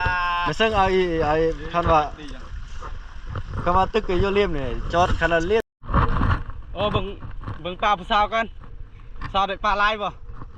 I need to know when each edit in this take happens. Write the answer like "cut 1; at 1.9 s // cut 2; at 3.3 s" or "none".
cut 1; at 5.6 s